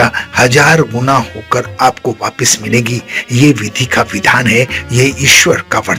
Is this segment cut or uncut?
uncut